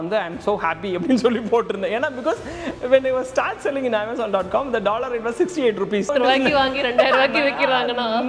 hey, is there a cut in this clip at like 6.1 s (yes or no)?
yes